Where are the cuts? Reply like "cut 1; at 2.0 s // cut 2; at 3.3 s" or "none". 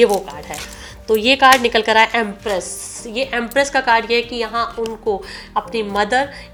none